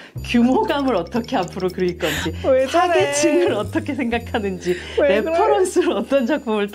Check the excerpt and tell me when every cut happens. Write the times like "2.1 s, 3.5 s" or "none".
none